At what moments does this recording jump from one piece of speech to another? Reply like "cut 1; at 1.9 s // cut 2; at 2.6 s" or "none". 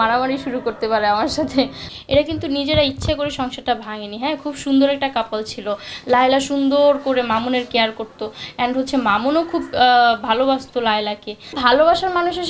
cut 1; at 1.8 s // cut 2; at 11.6 s